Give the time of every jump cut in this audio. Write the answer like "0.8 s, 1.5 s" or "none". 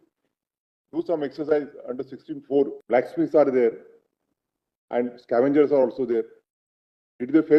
2.8 s